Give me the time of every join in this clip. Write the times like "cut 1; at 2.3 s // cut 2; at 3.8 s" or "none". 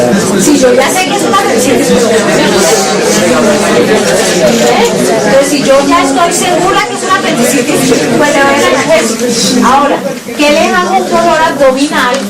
cut 1; at 3.3 s